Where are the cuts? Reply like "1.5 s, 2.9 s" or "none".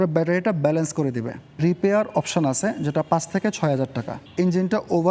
1.6 s, 4.2 s

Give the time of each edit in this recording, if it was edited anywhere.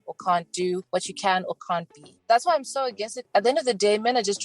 3.2 s

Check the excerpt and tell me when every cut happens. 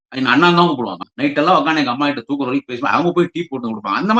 1.0 s

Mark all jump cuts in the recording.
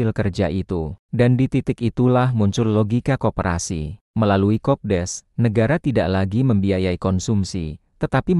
1.0 s, 4.0 s

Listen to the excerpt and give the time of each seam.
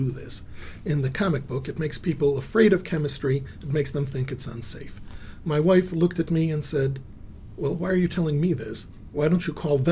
none

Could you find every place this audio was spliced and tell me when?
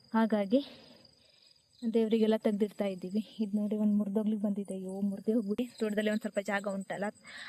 5.6 s

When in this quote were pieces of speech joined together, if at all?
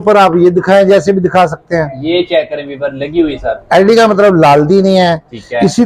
none

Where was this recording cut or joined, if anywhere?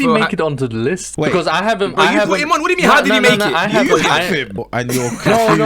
1.1 s, 4.6 s

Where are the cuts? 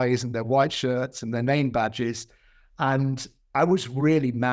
none

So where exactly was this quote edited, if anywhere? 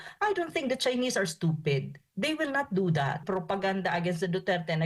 3.2 s

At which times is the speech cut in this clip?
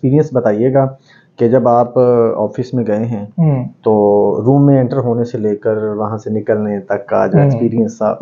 none

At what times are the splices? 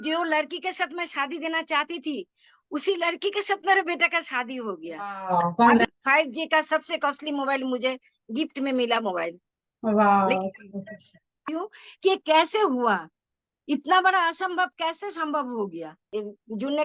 5.9 s, 11.4 s, 16.0 s

